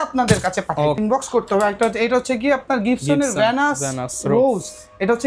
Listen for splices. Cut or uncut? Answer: cut